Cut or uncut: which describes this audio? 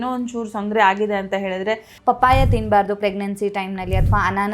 cut